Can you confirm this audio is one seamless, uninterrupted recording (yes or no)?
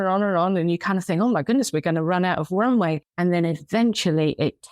no